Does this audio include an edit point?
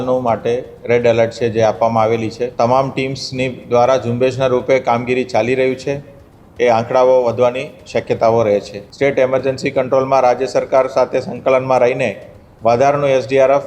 yes; 2 cuts; at 2.5 s, 8.8 s

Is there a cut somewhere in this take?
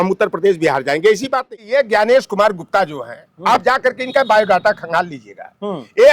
yes; 1 cut; at 1.5 s

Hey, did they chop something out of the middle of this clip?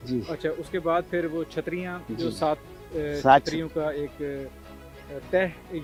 no; 0 cuts

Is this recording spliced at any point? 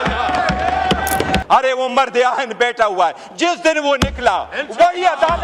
yes; 1 cut; at 1.4 s

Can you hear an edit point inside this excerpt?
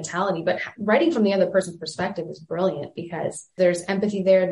yes; 1 cut; at 3.5 s

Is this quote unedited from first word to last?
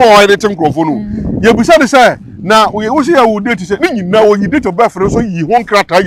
yes; 0 cuts

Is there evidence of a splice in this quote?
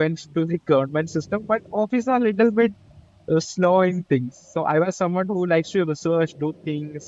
no; 0 cuts

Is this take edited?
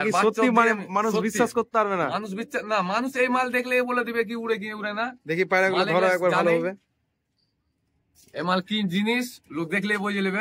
no; 0 cuts

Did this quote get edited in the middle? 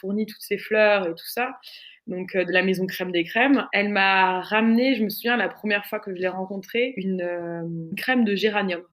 yes; 2 cuts; at 3.7 s, 7.0 s

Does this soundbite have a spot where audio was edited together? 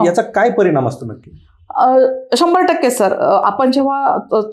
no; 0 cuts

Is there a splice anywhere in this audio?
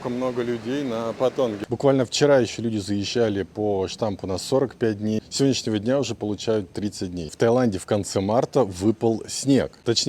yes; 2 cuts; at 1.6 s, 7.3 s

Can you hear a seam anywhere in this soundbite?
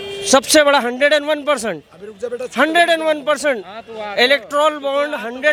no; 0 cuts

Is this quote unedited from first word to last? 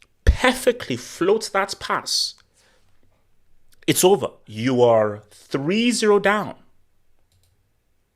no; 1 cut; at 4.4 s

